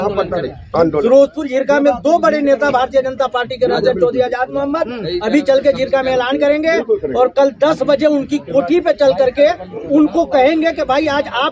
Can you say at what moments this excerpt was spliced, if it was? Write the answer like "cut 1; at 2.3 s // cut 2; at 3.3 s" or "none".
cut 1; at 1.0 s